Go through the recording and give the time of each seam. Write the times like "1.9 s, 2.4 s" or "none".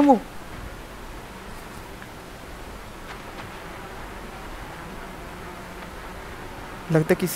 none